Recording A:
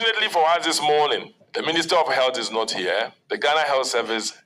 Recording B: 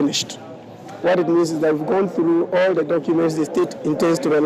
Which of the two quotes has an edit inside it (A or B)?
A